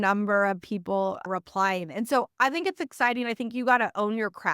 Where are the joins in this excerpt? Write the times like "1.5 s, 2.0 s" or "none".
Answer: 1.2 s